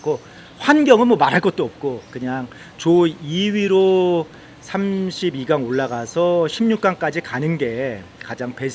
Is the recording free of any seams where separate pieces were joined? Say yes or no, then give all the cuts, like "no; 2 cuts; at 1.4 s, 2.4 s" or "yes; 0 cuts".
yes; 0 cuts